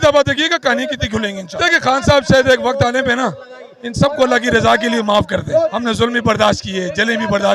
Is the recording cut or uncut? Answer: cut